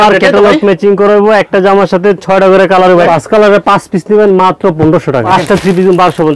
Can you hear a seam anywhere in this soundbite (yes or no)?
yes